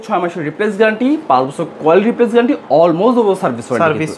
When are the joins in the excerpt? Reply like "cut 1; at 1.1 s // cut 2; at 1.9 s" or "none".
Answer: none